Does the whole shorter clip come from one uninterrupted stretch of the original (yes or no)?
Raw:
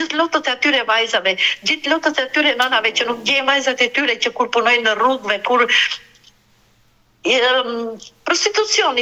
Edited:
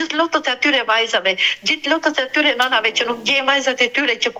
yes